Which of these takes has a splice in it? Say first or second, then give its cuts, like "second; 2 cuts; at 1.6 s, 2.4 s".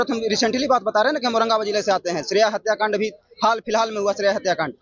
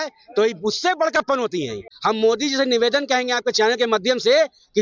second; 1 cut; at 1.9 s